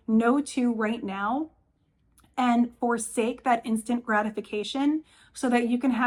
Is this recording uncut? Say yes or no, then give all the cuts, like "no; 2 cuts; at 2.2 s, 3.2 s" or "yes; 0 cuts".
yes; 0 cuts